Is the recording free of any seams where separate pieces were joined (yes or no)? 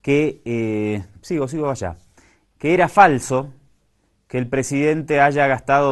yes